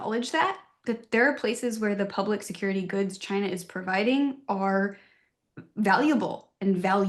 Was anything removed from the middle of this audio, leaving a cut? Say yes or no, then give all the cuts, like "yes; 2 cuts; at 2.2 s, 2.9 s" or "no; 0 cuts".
no; 0 cuts